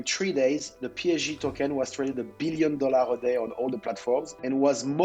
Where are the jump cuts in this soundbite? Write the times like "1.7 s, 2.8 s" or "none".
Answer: none

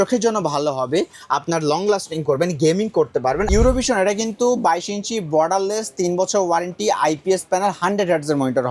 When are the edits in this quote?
3.5 s

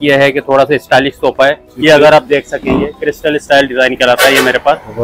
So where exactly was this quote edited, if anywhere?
1.7 s

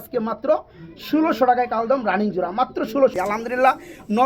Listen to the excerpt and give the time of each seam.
3.1 s

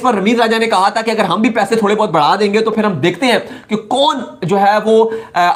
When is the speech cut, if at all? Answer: none

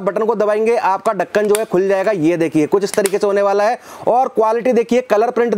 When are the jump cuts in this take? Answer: none

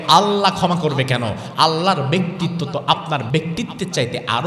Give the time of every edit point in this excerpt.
3.2 s

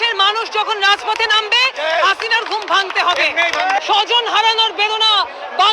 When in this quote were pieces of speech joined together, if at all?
3.8 s

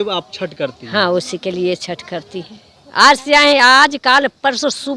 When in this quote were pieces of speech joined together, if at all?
none

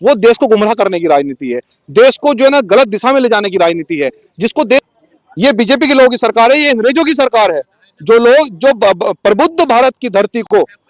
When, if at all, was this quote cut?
4.8 s

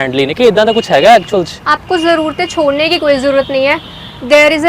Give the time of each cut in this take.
1.6 s

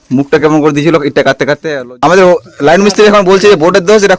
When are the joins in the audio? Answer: 1.8 s

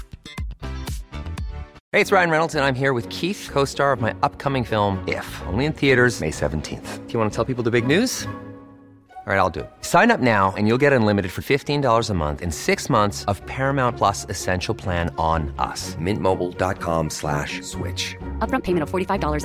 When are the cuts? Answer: 1.8 s

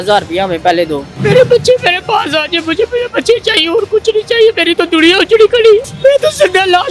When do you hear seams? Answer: 1.1 s, 5.9 s

